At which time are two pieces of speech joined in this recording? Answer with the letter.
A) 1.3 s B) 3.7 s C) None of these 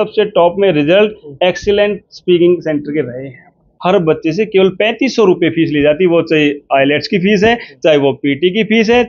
B